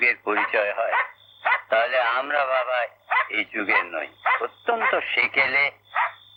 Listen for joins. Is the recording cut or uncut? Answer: uncut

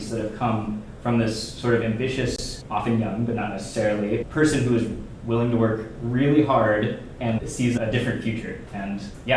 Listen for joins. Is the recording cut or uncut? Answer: uncut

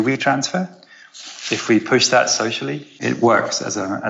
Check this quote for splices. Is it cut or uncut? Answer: cut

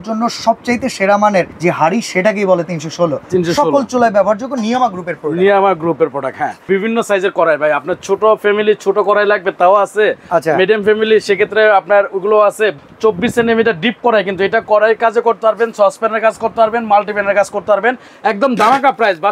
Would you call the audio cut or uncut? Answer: cut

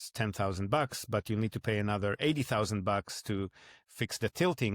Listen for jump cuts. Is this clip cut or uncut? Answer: uncut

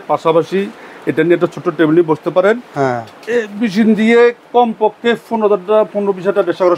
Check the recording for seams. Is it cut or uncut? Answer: uncut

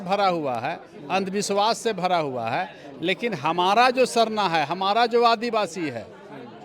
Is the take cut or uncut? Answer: uncut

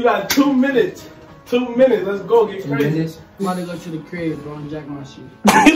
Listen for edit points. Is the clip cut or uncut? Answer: cut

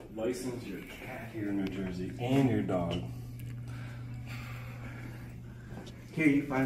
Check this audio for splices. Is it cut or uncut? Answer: uncut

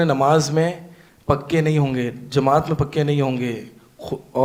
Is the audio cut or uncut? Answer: uncut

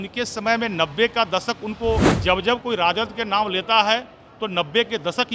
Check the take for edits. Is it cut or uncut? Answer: cut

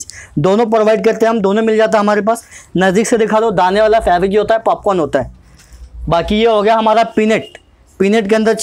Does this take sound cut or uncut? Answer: uncut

